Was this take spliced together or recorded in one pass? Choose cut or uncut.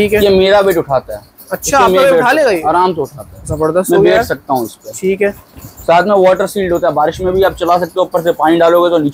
uncut